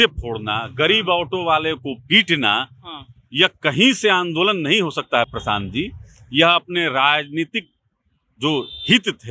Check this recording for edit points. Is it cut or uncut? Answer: uncut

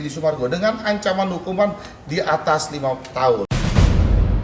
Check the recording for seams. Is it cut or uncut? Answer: cut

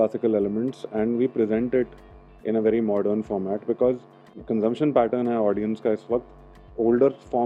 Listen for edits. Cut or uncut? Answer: cut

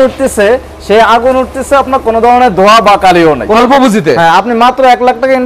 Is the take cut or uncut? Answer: cut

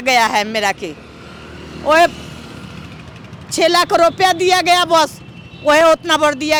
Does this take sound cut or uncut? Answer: uncut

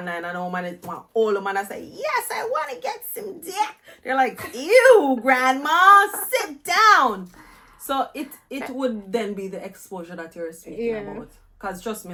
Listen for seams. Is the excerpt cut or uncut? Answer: uncut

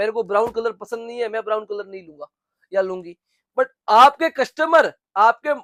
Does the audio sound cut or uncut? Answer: uncut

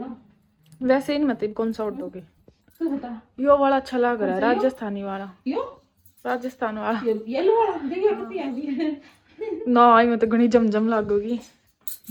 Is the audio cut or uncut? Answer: uncut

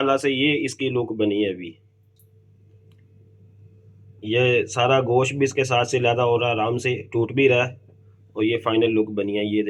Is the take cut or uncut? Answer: uncut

